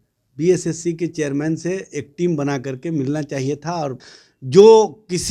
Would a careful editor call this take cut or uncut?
cut